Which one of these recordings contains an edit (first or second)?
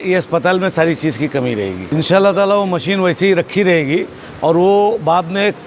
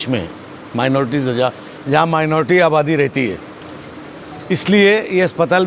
first